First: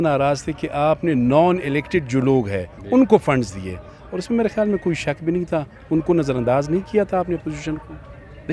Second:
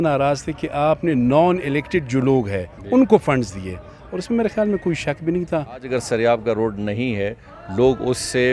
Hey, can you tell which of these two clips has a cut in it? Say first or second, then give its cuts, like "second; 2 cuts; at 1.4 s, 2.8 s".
second; 1 cut; at 5.8 s